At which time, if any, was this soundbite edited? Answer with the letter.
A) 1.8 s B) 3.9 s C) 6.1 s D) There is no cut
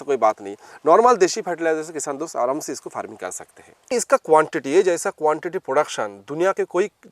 B